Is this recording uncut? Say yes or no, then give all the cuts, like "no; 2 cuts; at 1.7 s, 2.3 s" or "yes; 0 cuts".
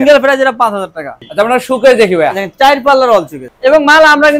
no; 2 cuts; at 1.2 s, 3.4 s